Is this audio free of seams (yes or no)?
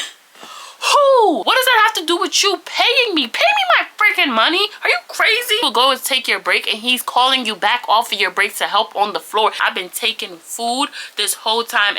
no